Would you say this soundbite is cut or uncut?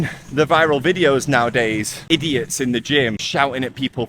cut